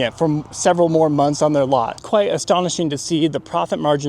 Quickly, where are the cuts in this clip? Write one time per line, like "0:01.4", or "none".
0:02.0